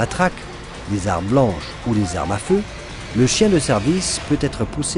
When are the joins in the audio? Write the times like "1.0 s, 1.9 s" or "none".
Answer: none